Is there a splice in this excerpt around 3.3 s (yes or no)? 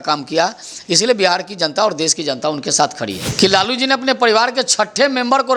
yes